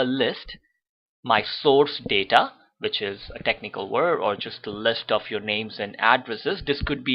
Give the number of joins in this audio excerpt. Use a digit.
1